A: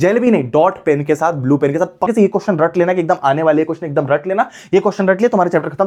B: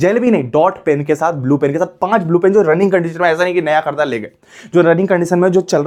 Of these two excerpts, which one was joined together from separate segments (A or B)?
A